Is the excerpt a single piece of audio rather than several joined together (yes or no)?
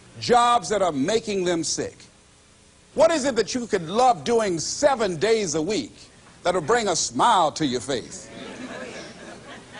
no